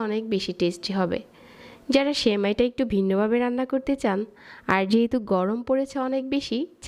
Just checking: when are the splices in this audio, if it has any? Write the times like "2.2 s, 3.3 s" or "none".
none

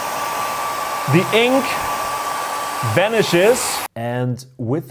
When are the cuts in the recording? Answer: 3.8 s

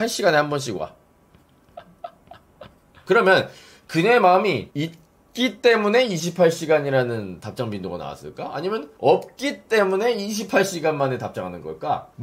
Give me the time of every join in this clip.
3.0 s

